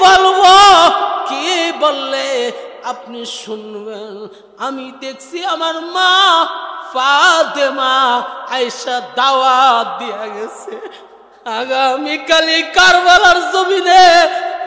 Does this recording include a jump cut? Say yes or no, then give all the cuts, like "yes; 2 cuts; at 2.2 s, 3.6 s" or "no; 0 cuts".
no; 0 cuts